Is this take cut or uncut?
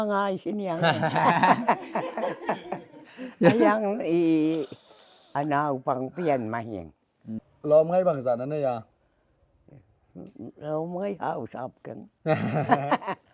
cut